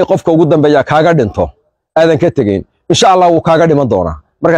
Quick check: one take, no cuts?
yes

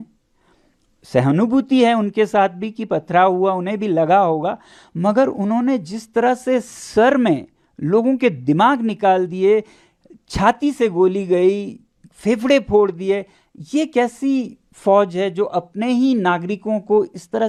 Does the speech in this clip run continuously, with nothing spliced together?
yes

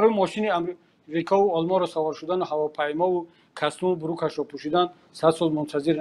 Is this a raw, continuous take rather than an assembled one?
yes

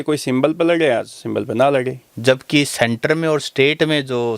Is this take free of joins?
no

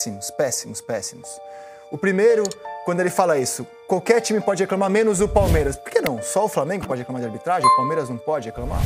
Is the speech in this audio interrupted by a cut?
yes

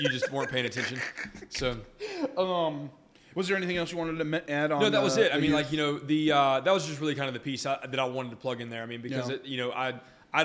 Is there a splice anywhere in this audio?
no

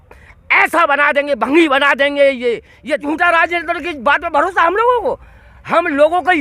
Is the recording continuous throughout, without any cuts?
no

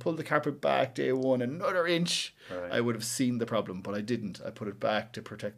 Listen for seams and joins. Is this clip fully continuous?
yes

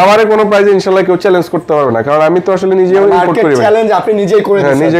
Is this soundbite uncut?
yes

